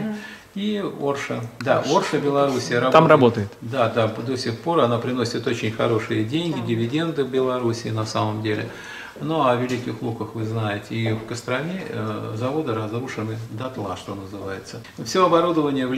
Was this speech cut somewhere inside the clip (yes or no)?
yes